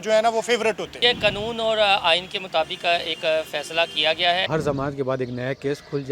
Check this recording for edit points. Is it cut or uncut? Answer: cut